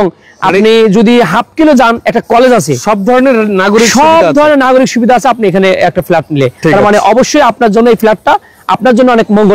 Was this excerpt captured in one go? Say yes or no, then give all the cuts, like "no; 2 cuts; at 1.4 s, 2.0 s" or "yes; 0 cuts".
yes; 0 cuts